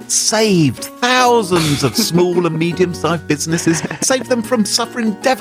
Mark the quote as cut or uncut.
cut